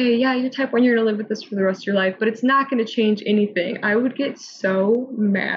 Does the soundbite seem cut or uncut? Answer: uncut